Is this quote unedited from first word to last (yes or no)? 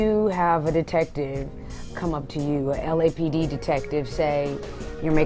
yes